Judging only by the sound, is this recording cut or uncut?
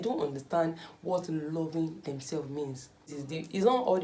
cut